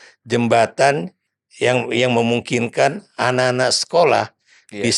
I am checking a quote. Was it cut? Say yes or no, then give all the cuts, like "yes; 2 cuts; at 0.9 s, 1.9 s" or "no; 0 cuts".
yes; 1 cut; at 1.2 s